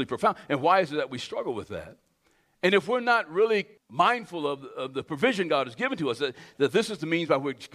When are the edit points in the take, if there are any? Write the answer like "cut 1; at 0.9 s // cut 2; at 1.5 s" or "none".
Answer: cut 1; at 3.8 s